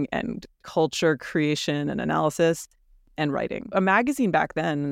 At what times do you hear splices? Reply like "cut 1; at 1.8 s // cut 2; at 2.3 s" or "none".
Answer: cut 1; at 3.7 s